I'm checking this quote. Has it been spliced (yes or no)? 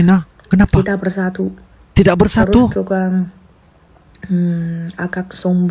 no